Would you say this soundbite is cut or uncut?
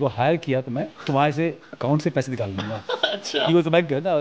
cut